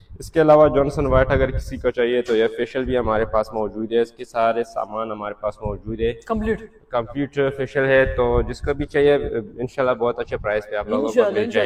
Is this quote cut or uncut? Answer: uncut